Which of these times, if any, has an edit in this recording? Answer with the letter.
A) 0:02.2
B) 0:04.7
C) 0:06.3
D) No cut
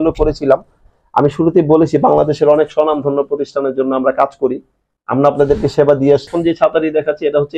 C